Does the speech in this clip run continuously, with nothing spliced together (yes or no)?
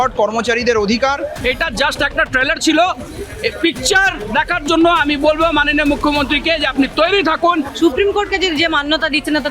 no